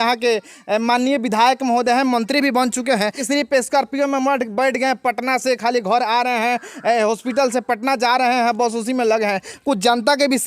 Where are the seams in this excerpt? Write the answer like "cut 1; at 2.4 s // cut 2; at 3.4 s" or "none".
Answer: cut 1; at 3.3 s